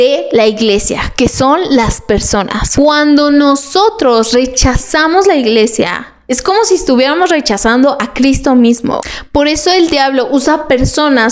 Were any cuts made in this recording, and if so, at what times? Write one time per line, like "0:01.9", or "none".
0:02.6
0:09.1